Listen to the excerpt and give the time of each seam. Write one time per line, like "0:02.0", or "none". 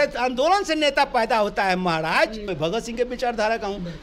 0:02.5